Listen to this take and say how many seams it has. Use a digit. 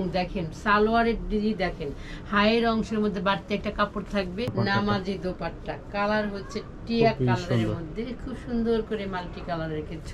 1